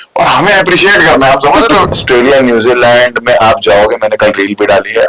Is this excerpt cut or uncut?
cut